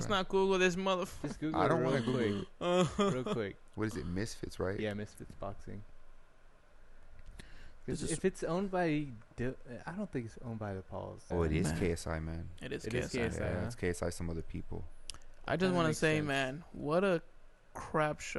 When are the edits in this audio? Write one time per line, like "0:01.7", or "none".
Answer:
none